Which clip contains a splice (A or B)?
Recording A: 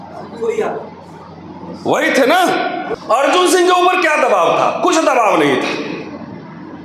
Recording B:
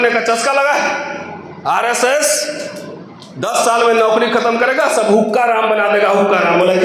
A